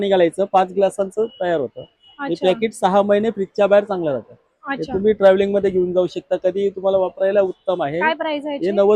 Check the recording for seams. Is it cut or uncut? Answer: uncut